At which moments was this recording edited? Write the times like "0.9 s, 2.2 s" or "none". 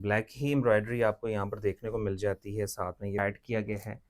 3.2 s